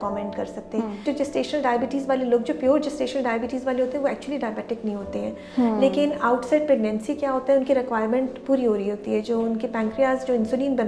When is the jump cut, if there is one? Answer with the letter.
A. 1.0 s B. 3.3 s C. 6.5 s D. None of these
A